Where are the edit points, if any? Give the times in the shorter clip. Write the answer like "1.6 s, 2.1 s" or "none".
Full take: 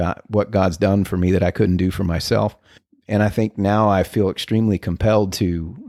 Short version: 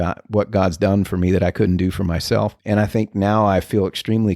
2.6 s